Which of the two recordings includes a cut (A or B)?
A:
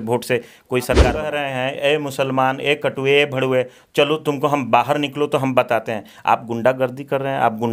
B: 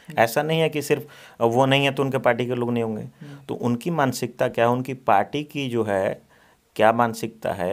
A